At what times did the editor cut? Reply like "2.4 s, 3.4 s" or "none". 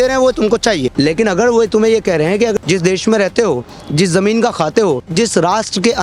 0.9 s, 2.6 s, 5.1 s